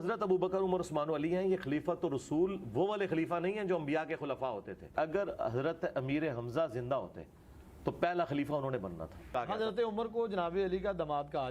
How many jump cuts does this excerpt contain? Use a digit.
2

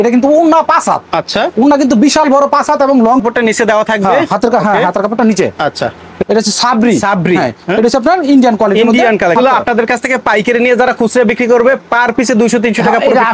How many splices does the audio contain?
3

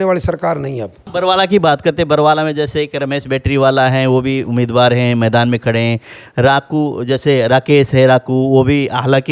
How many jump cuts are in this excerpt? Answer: 1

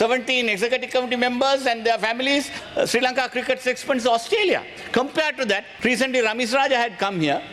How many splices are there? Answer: 2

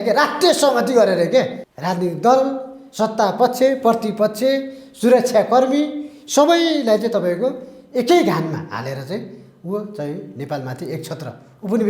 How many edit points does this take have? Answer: 1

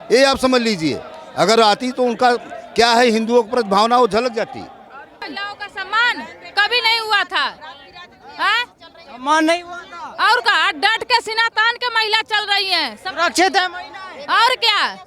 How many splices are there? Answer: 1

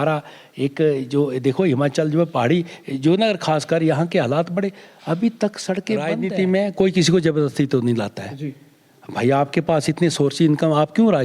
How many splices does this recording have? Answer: 1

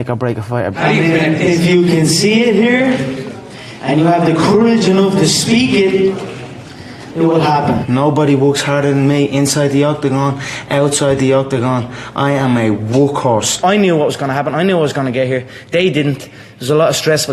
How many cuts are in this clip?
3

